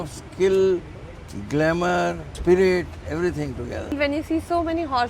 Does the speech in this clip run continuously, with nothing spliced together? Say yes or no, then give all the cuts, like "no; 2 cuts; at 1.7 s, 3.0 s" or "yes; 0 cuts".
no; 2 cuts; at 2.3 s, 3.9 s